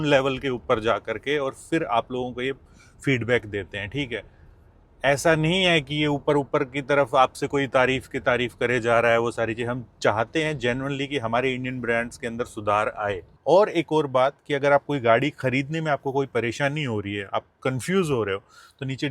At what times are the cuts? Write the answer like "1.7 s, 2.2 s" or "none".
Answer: 13.3 s